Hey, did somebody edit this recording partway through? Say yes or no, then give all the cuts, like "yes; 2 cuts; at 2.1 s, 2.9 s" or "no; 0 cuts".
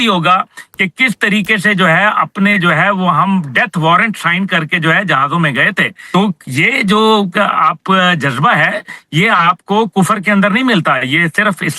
yes; 1 cut; at 5.9 s